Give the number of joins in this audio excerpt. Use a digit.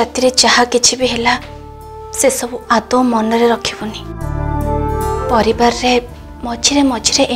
1